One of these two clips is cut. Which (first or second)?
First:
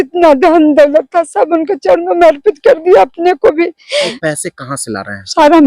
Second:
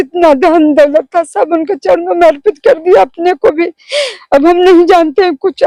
first